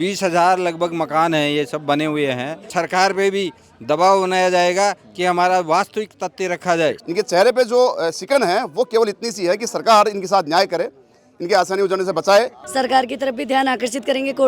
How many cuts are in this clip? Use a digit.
3